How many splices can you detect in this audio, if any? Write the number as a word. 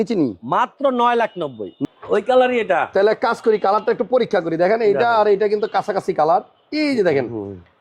one